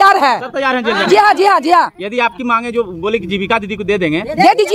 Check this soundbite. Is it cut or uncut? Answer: uncut